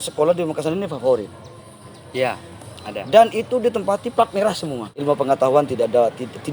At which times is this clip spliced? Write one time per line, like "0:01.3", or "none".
0:04.9